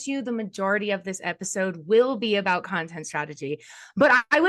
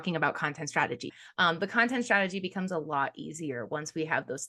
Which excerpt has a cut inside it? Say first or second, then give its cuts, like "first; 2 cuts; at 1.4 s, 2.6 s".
second; 1 cut; at 1.1 s